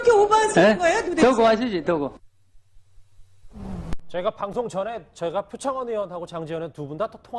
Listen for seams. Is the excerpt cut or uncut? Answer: cut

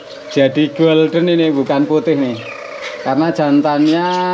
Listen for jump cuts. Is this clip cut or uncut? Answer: uncut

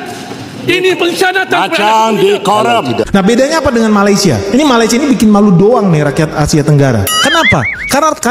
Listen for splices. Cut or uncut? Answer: cut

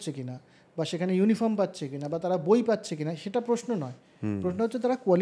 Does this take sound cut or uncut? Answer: uncut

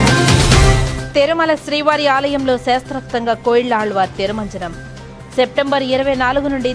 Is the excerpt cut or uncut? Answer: uncut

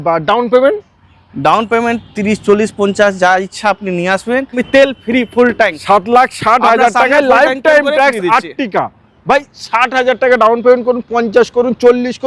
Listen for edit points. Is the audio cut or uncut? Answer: cut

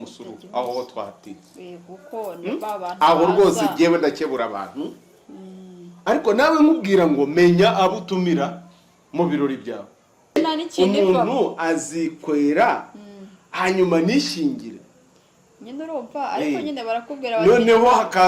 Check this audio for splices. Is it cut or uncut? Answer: cut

